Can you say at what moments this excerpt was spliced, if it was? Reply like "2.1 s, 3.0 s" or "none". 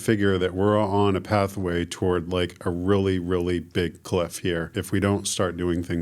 4.8 s